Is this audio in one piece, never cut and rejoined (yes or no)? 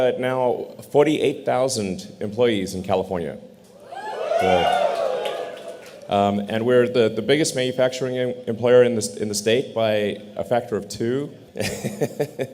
no